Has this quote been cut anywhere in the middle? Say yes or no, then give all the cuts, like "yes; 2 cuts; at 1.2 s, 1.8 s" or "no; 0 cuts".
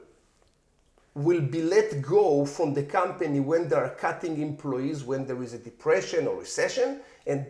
no; 0 cuts